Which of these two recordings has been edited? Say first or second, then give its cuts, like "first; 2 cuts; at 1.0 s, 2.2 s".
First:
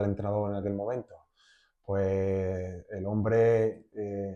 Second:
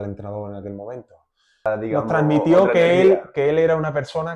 second; 1 cut; at 1.6 s